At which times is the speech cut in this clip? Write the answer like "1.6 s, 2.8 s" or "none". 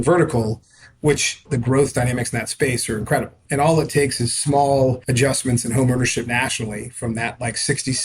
1.4 s, 3.4 s, 5.0 s